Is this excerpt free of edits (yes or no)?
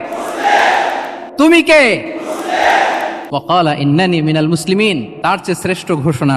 no